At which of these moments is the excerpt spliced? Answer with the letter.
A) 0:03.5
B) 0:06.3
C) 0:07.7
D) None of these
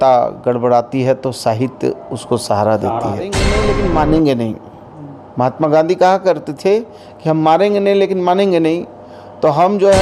A